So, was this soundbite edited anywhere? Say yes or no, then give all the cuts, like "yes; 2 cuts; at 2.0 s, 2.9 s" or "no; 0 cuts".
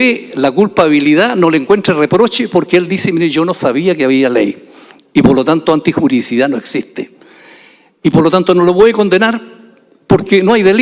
no; 0 cuts